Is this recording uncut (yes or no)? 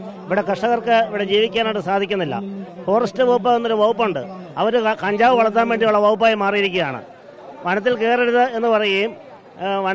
yes